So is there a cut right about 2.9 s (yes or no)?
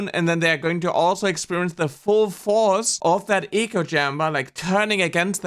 yes